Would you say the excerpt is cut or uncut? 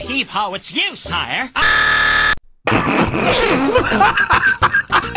uncut